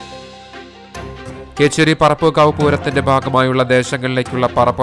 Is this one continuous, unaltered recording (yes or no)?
yes